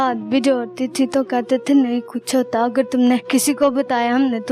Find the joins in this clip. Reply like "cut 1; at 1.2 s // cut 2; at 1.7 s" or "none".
cut 1; at 3.2 s